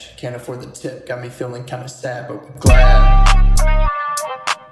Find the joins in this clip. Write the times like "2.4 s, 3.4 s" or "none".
3.4 s

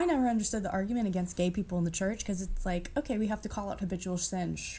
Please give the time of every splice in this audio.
2.5 s

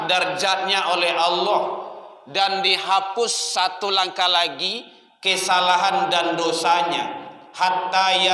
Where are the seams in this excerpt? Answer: none

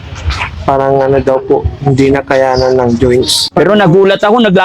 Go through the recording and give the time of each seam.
3.4 s

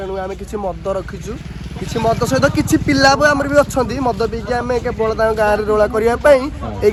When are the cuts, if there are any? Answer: none

